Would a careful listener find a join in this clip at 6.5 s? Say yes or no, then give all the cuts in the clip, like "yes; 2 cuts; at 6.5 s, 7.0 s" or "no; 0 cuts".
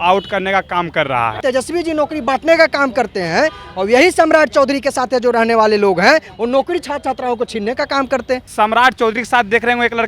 no; 2 cuts; at 1.4 s, 8.5 s